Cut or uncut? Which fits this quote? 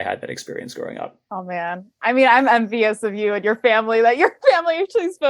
cut